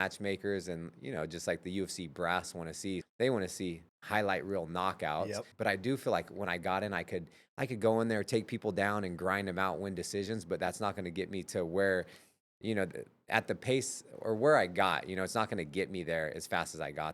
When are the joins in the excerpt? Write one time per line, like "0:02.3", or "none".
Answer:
0:03.0
0:03.9
0:05.5